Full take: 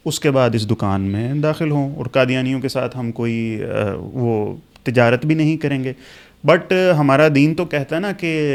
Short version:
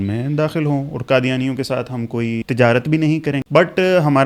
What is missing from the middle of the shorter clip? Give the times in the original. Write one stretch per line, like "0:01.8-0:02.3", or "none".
0:03.5-0:04.8
0:05.8-0:06.4